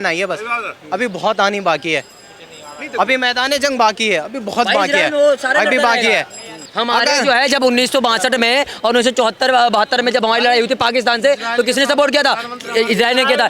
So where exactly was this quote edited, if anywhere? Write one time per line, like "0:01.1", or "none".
0:06.6

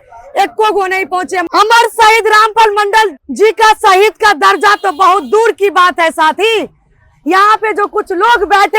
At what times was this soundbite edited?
0:01.4
0:03.2

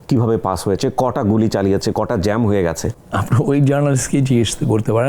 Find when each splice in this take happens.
0:02.9

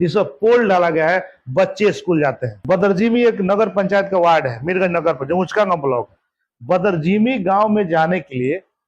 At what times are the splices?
0:02.6

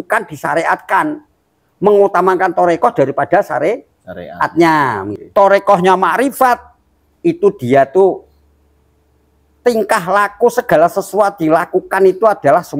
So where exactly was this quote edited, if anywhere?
0:05.1

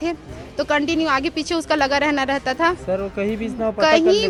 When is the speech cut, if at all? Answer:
none

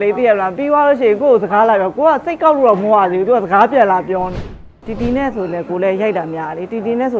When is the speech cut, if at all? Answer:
0:04.7

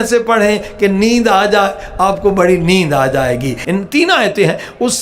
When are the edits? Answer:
0:03.6

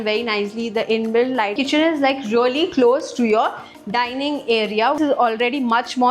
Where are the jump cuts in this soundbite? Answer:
0:01.5
0:05.0

